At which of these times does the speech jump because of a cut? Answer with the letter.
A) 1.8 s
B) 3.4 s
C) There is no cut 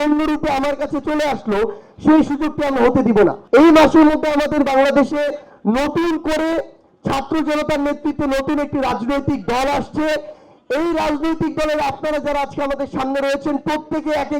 B